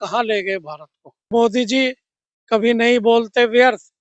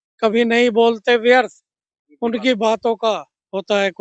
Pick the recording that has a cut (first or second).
first